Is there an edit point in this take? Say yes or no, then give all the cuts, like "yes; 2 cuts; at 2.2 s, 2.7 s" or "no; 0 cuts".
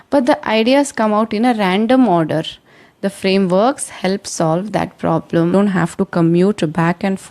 yes; 1 cut; at 5.5 s